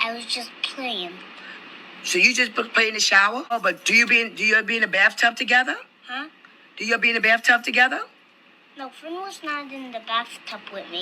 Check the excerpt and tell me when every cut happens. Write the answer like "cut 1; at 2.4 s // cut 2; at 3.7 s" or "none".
cut 1; at 3.5 s

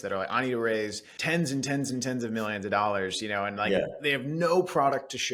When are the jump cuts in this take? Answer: none

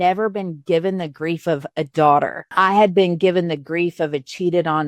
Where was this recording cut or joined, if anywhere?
cut 1; at 2.4 s

